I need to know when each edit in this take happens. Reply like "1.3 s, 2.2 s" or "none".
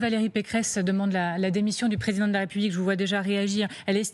none